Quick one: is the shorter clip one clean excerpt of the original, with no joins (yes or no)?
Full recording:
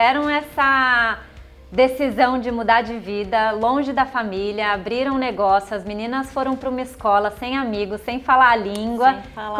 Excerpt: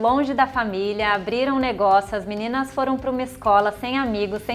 yes